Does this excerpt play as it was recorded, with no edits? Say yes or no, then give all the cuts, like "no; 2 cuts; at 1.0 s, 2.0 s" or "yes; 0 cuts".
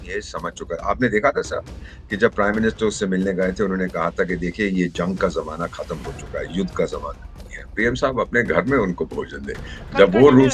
no; 1 cut; at 7.8 s